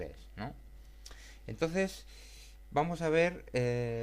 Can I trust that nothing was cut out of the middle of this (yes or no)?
no